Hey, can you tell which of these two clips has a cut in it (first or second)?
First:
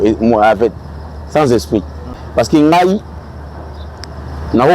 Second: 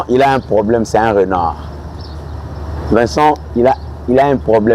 first